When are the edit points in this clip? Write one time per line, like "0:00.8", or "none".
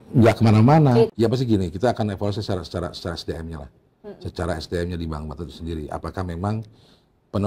0:01.1